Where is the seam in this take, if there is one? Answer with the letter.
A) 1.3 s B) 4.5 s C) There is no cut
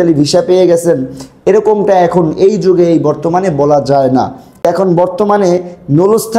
B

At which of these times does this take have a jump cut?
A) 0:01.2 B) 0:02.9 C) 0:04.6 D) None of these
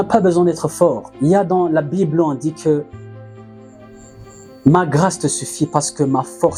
D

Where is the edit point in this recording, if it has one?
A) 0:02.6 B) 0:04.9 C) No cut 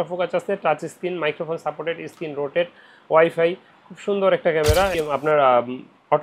B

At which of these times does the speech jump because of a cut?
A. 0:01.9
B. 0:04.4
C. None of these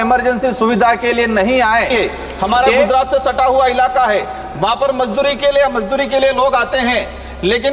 A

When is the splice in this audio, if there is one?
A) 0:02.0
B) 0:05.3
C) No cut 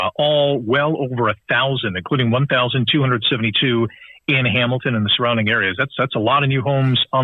C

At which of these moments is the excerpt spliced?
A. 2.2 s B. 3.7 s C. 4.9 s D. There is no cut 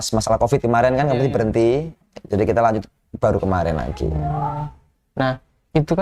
D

